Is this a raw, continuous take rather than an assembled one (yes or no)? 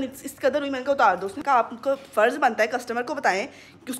no